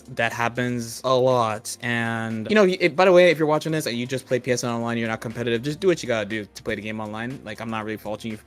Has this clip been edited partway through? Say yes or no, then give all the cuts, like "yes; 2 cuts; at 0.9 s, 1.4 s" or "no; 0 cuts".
yes; 2 cuts; at 0.9 s, 2.4 s